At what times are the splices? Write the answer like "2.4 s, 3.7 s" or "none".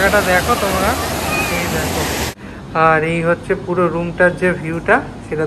2.3 s